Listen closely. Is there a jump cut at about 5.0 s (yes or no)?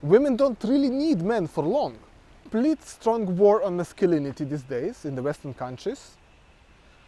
no